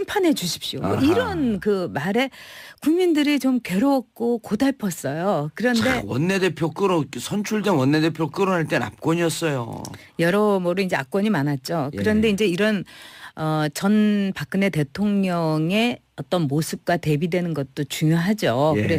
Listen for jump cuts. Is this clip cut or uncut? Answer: uncut